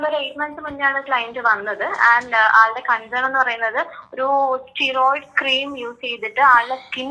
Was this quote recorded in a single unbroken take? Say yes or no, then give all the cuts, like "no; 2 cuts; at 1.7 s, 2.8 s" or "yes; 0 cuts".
yes; 0 cuts